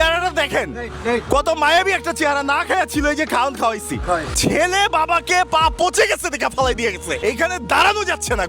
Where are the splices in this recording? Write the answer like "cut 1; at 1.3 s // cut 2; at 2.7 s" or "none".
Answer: cut 1; at 4.3 s // cut 2; at 7.2 s

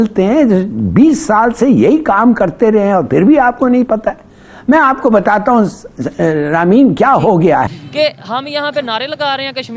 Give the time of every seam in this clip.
cut 1; at 7.7 s

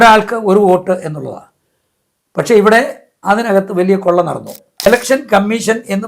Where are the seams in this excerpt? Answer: cut 1; at 4.9 s

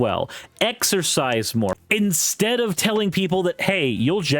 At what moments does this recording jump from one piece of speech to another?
cut 1; at 1.8 s

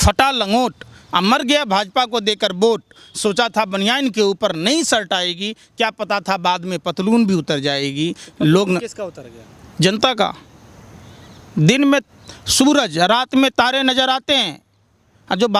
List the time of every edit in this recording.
none

